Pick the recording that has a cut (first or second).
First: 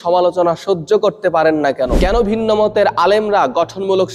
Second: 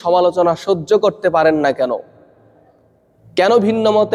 first